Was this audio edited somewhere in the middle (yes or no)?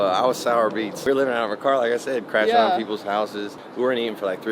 yes